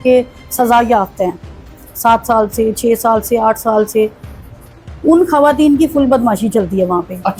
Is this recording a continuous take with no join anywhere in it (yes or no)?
yes